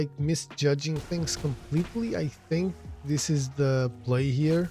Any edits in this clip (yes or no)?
no